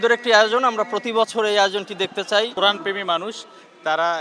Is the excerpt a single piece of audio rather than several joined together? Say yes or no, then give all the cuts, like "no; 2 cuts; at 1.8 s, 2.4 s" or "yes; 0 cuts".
no; 1 cut; at 2.5 s